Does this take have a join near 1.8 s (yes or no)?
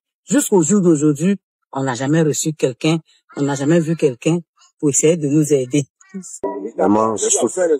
no